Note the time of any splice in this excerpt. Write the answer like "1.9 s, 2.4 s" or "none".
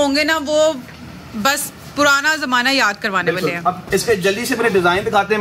none